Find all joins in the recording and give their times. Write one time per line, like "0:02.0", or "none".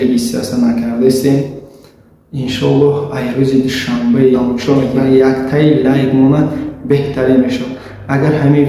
0:04.4